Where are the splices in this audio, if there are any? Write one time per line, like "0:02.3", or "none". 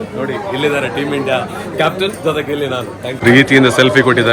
0:03.2